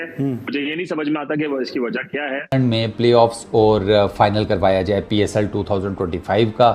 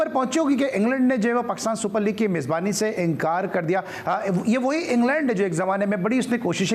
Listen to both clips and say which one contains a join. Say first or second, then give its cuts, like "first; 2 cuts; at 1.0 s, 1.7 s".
first; 1 cut; at 2.5 s